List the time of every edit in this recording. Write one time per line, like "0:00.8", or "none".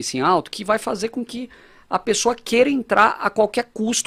none